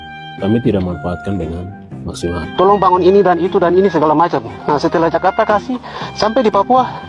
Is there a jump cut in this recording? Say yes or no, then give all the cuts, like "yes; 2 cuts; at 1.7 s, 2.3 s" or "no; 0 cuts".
yes; 1 cut; at 2.4 s